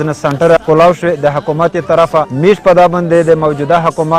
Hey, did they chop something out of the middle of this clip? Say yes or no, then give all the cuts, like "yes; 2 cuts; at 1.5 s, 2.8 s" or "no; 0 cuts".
no; 0 cuts